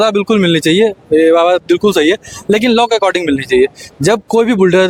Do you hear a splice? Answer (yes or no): no